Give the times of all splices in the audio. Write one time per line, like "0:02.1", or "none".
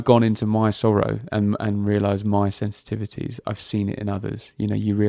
none